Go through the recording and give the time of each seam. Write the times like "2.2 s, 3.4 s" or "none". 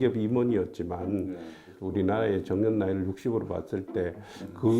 1.8 s